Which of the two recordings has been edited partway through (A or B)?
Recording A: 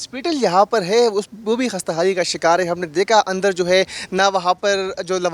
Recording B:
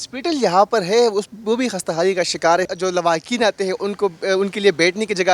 B